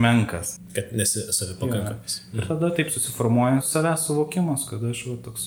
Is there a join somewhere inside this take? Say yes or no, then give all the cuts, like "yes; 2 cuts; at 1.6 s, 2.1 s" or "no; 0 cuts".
yes; 1 cut; at 3.7 s